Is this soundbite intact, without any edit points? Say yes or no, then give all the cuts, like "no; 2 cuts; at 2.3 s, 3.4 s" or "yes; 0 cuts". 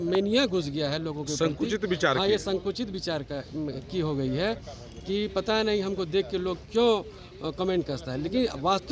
yes; 0 cuts